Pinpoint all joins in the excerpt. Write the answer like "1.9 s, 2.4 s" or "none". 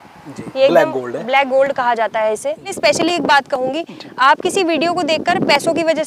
2.7 s